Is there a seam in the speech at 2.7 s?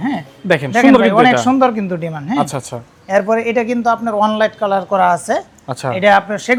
no; 0 cuts

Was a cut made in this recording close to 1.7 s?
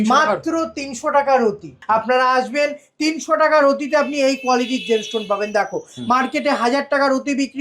yes; 1 cut; at 1.7 s

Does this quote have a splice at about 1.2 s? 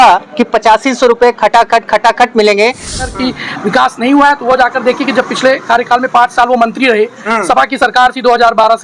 no; 1 cut; at 3.1 s

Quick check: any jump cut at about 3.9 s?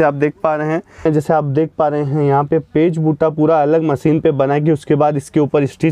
no; 1 cut; at 1.0 s

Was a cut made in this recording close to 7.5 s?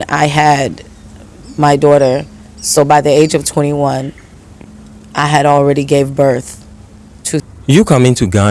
yes; 1 cut; at 7.5 s

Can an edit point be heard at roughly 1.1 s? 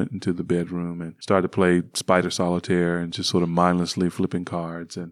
yes; 1 cut; at 1.1 s

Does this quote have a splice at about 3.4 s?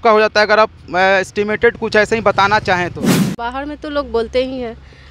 yes; 1 cut; at 3.4 s

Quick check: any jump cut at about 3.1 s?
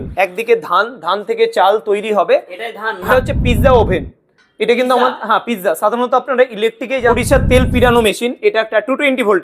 yes; 2 cuts; at 3.1 s, 7.1 s

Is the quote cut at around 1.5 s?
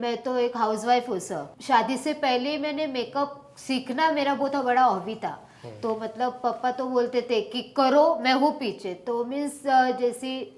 yes; 1 cut; at 1.5 s

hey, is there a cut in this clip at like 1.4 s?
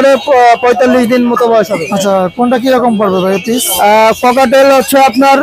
no; 0 cuts

